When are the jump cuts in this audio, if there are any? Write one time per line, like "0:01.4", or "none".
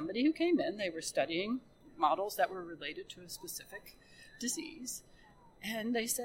0:01.8